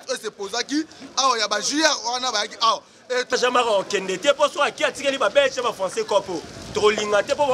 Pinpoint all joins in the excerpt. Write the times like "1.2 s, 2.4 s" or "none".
3.3 s

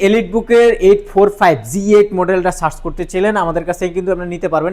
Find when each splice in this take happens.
none

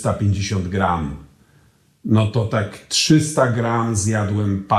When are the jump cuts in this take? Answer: none

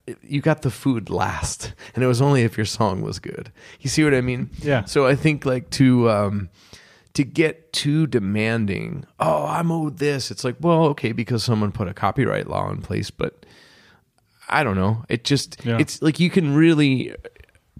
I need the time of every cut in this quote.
none

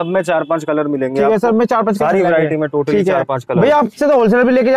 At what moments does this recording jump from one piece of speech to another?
3.4 s

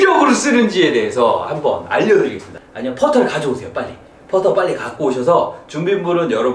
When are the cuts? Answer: 2.6 s

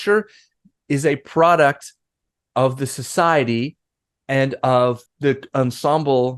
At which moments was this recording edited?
5.1 s

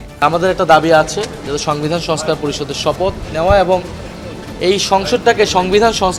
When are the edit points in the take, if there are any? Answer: none

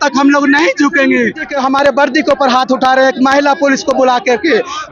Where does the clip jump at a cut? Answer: 1.5 s

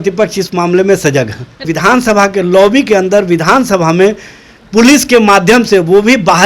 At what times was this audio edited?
1.6 s

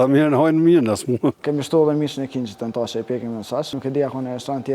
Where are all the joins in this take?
1.4 s, 3.7 s

